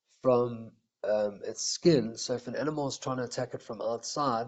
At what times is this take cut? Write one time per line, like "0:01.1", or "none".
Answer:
none

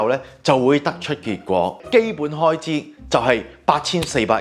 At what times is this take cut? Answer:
0:01.8

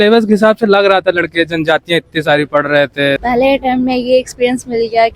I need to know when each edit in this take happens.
0:03.2

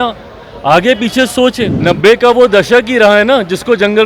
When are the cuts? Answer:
0:01.7

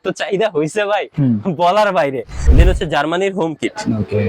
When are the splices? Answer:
0:02.3

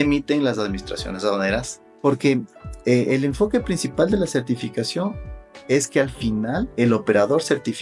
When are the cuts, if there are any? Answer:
0:01.8
0:06.7

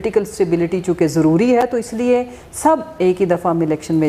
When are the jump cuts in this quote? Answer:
none

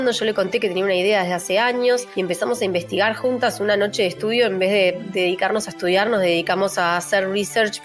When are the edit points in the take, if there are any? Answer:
0:02.1
0:05.0

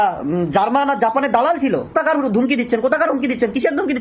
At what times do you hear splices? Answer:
0:01.9

